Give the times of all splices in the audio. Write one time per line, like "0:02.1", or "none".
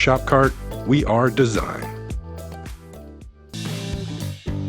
0:03.5